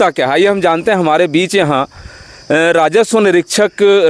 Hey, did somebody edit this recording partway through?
no; 0 cuts

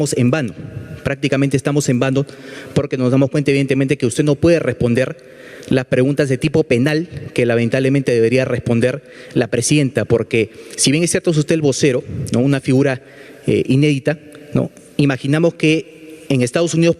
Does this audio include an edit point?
no; 0 cuts

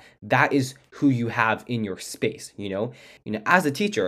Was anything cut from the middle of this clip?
yes; 1 cut; at 3.1 s

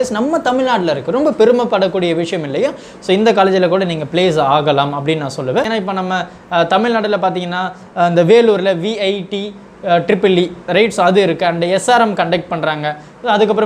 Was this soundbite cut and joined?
yes; 1 cut; at 5.7 s

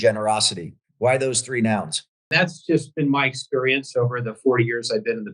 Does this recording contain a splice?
yes; 1 cut; at 2.3 s

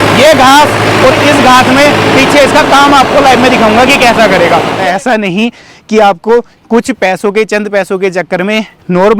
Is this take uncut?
no; 1 cut; at 4.8 s

